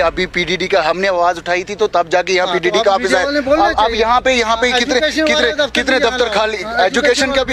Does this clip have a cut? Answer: no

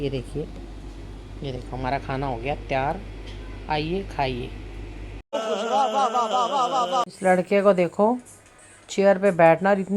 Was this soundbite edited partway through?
no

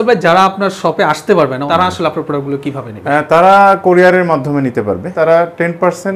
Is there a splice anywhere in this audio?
yes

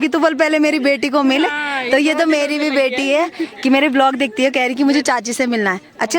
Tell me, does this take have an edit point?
no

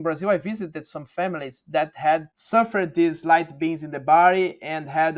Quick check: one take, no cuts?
no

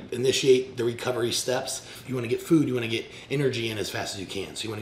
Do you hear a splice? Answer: yes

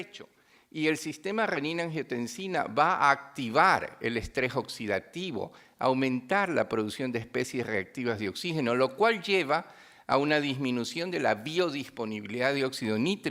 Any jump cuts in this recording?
no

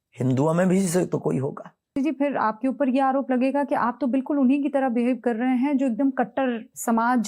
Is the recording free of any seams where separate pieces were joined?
no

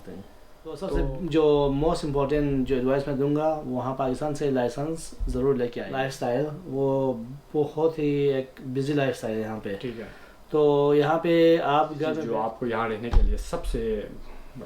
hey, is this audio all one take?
no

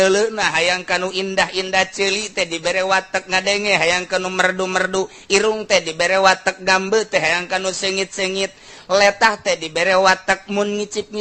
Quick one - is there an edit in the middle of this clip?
no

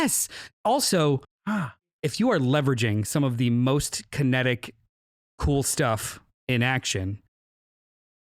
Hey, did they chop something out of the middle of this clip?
yes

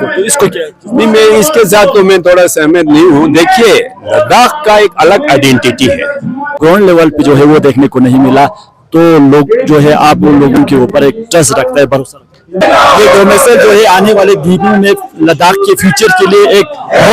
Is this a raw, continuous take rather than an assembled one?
no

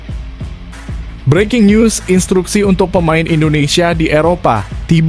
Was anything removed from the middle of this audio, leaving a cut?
yes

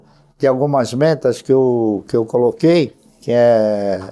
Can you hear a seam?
no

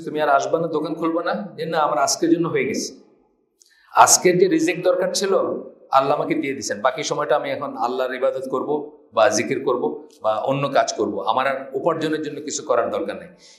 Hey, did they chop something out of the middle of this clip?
no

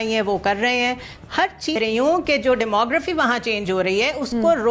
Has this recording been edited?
yes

